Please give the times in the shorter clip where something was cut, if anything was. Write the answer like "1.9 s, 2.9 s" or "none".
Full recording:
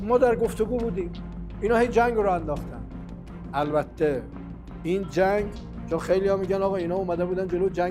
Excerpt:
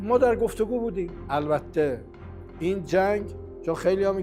1.1 s